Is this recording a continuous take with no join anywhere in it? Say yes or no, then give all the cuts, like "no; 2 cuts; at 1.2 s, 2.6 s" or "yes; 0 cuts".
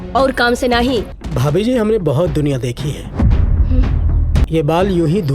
no; 2 cuts; at 1.2 s, 4.5 s